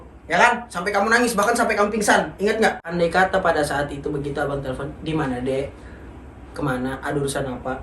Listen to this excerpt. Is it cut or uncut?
cut